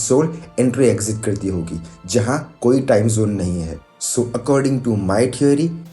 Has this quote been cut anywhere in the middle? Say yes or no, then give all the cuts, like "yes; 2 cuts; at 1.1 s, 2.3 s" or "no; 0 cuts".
no; 0 cuts